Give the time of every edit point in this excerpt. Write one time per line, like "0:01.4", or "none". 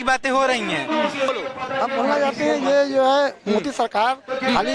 0:01.3

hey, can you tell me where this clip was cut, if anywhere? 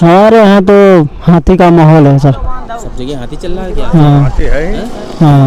none

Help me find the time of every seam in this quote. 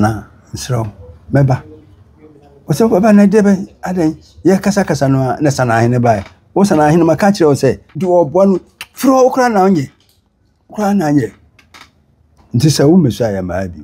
0:07.9
0:12.3

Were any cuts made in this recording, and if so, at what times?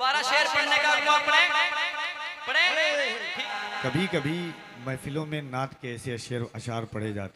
0:03.5

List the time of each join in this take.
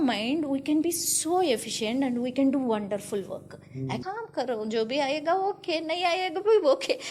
0:04.0

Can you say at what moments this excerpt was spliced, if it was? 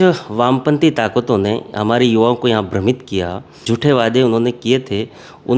0:03.7

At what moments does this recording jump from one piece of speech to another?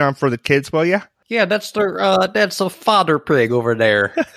0:01.2

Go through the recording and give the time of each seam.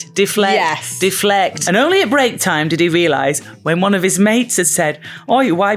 0:01.6

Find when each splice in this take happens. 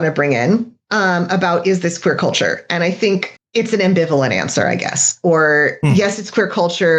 0:03.4

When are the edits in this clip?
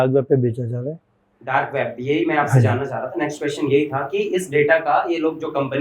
none

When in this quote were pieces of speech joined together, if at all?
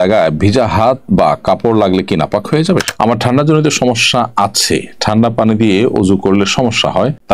0:02.9

